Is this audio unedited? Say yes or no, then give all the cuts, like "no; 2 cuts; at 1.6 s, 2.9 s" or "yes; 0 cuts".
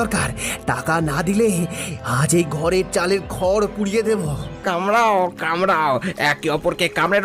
no; 1 cut; at 4.4 s